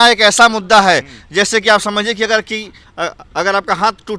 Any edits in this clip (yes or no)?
no